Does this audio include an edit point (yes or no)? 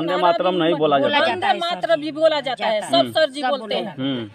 no